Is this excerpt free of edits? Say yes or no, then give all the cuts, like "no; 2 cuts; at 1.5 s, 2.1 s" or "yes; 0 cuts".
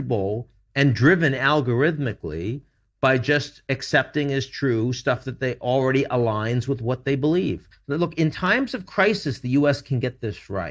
no; 1 cut; at 7.7 s